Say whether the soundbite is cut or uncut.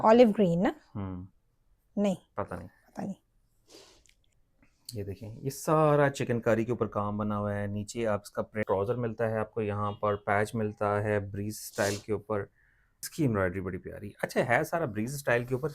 cut